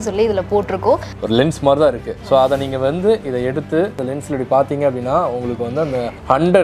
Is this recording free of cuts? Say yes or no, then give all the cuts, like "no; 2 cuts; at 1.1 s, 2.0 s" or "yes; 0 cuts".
no; 2 cuts; at 1.1 s, 4.0 s